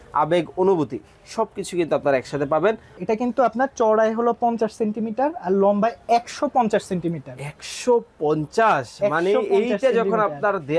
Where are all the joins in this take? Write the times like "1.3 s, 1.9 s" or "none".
2.9 s